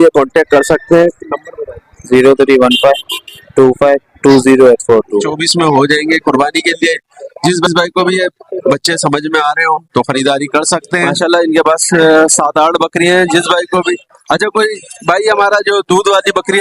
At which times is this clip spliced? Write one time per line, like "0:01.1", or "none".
0:05.4
0:11.1

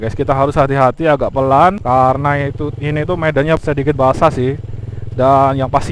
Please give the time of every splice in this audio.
0:01.8
0:03.6

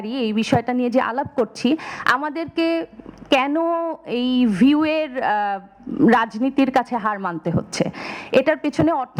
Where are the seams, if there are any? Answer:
none

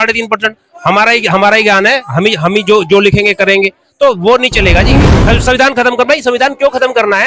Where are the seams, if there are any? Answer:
0:05.0

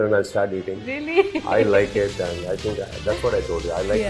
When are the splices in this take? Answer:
none

